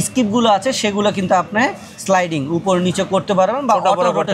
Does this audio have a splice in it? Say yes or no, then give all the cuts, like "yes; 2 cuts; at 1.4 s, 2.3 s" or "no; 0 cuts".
no; 0 cuts